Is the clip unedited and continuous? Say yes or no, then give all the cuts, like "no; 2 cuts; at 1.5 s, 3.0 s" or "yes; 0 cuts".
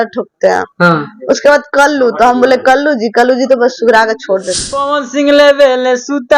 no; 1 cut; at 4.8 s